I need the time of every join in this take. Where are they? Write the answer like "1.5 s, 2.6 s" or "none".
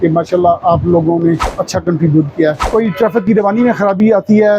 1.5 s, 2.6 s